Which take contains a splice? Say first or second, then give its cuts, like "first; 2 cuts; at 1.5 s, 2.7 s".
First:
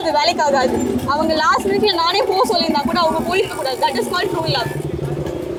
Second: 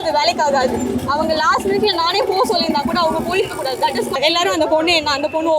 second; 1 cut; at 4.2 s